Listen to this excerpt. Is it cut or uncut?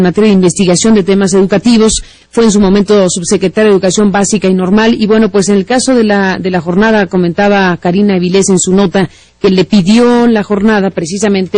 uncut